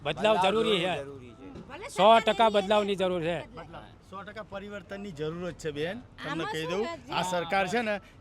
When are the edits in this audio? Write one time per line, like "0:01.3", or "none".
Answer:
0:04.0